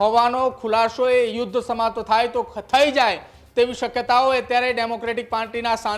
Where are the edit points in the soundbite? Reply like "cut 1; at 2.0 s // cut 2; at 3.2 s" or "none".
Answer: none